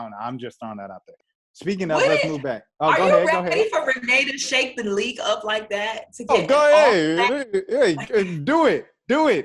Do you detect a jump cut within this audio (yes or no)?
no